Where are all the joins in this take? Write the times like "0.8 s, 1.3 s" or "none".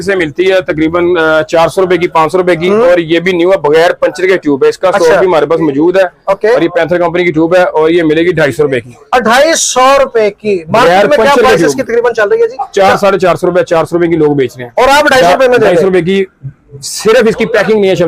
none